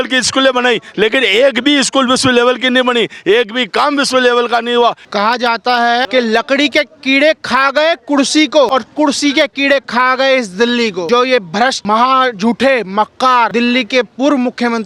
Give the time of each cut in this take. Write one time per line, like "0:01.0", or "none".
0:05.0
0:06.1
0:08.7
0:11.1
0:11.8
0:13.5